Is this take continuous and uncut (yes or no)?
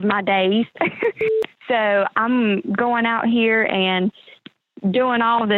no